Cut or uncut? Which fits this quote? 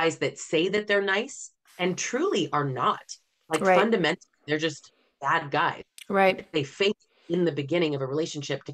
uncut